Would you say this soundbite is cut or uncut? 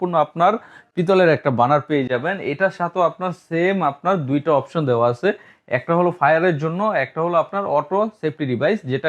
uncut